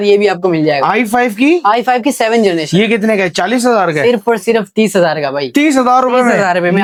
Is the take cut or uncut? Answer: uncut